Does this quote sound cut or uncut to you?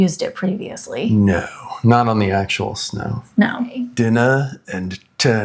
cut